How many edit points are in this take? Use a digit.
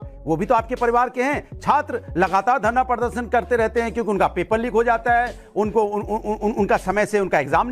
1